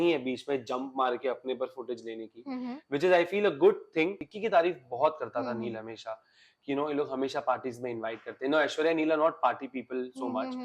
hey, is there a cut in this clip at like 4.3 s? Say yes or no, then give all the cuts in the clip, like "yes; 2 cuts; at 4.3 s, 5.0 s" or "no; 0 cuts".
yes; 1 cut; at 4.3 s